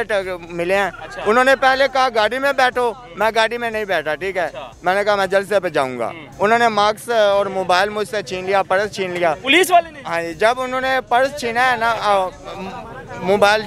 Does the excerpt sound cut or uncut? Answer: uncut